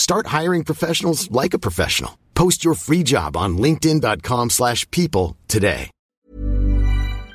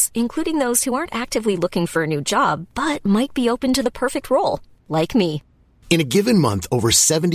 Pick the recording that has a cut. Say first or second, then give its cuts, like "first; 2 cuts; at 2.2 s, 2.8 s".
first; 1 cut; at 6.0 s